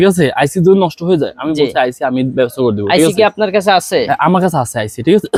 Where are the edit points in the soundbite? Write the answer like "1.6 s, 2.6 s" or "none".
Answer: none